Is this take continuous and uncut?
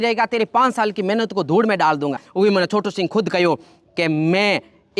no; 1 cut; at 2.2 s

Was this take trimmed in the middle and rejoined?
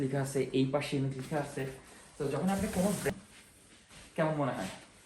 yes; 1 cut; at 3.1 s

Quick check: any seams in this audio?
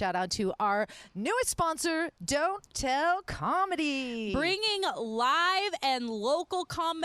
no; 0 cuts

